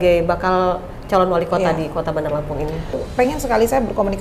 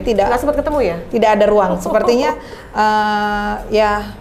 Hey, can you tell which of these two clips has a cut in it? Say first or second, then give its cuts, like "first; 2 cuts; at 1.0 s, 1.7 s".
first; 1 cut; at 3.0 s